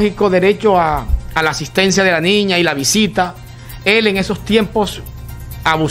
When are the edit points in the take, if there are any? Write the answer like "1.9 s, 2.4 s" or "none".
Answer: none